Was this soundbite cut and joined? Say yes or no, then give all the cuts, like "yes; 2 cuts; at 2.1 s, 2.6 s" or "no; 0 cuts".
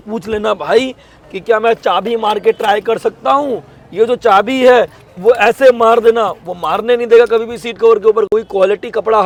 no; 0 cuts